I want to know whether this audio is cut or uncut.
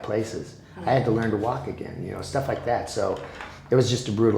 uncut